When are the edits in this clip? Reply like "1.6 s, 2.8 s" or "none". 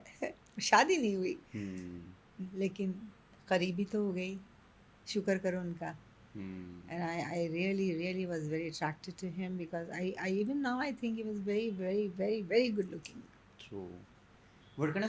none

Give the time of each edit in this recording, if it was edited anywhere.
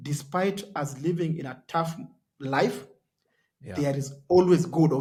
none

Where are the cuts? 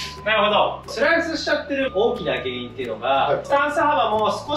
0.9 s, 3.5 s

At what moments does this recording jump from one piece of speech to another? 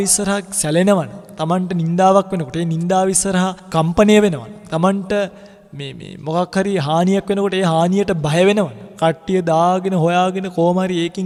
none

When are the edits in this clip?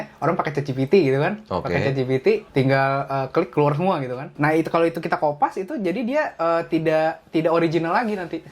2.5 s, 4.2 s

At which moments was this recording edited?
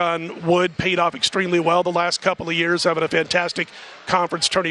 none

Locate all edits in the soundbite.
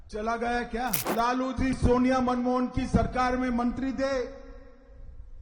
1.0 s

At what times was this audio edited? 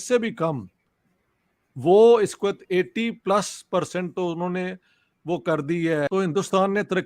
6.1 s

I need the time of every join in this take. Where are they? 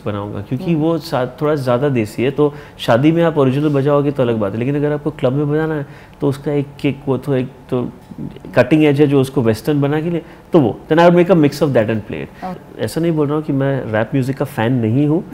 12.6 s

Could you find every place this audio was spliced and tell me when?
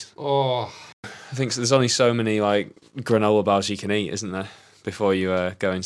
1.1 s

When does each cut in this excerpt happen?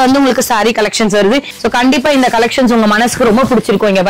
1.5 s

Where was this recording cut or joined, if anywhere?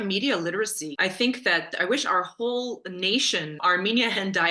0.8 s, 1.7 s, 3.6 s

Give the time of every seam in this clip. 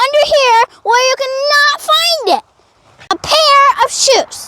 3.2 s

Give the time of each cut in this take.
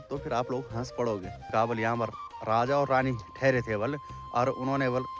1.5 s

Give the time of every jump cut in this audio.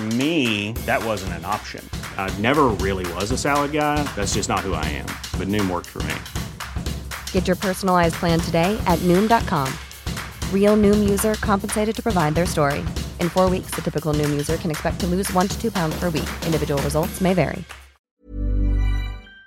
18.1 s

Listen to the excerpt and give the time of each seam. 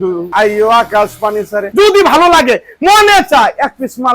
none

